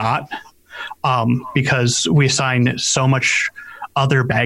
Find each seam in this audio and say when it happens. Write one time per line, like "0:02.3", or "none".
none